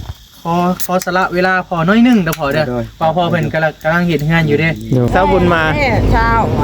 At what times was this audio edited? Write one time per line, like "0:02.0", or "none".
0:05.1